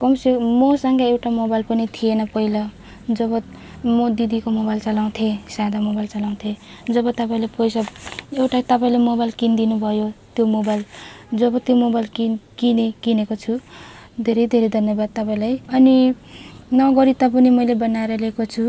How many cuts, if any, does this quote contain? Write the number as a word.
one